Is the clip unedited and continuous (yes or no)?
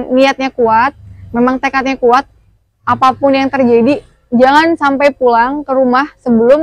yes